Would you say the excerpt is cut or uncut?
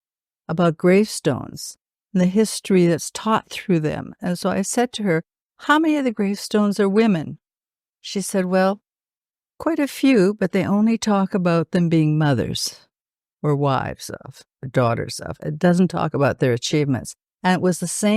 uncut